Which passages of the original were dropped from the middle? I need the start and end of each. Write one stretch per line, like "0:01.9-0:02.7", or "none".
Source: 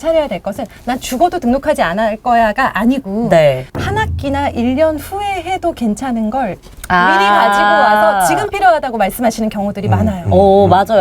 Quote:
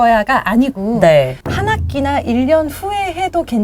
none